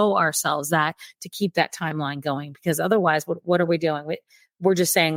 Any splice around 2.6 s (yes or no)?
no